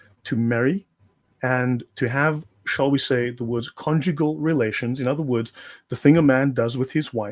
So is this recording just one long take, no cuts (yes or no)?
yes